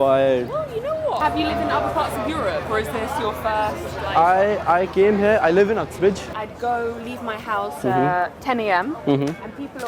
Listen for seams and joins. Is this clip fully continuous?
no; 2 cuts; at 1.2 s, 6.3 s

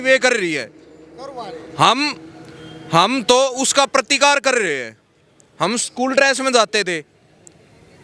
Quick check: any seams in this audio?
no; 0 cuts

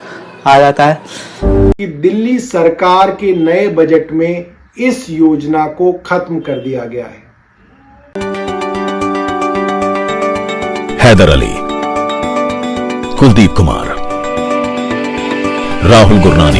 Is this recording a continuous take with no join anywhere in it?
no; 2 cuts; at 1.7 s, 8.2 s

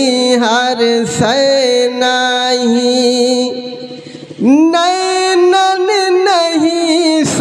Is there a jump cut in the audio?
no; 0 cuts

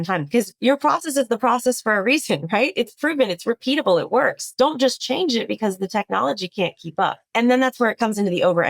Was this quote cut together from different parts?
yes; 2 cuts; at 2.7 s, 7.2 s

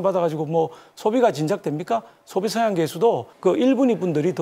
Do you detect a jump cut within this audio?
yes; 1 cut; at 3.3 s

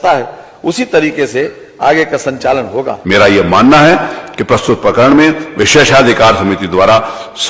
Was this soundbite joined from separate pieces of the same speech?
yes; 1 cut; at 2.9 s

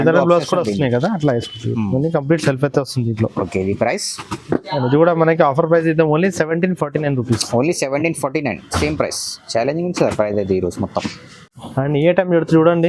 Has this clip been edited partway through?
no; 0 cuts

